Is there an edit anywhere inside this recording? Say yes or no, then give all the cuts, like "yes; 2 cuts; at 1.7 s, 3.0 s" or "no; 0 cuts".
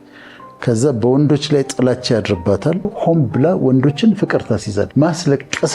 yes; 2 cuts; at 2.9 s, 4.9 s